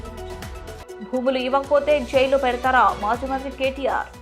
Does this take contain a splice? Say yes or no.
yes